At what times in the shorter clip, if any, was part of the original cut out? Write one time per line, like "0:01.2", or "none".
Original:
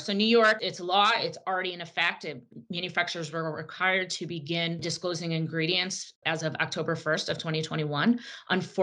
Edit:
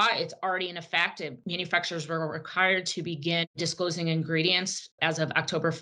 0:01.4